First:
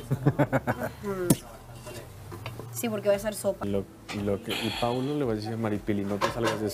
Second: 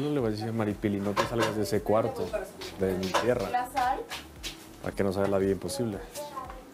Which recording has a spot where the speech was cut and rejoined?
first; 1 cut; at 3.6 s

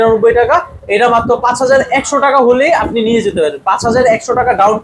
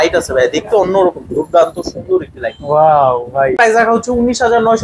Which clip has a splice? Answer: second; 1 cut; at 3.5 s

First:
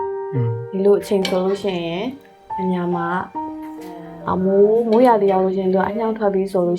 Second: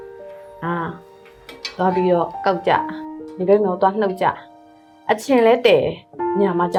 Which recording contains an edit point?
first; 1 cut; at 4.0 s

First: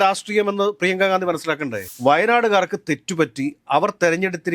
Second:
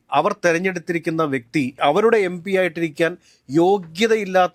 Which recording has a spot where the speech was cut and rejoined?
first; 1 cut; at 1.8 s

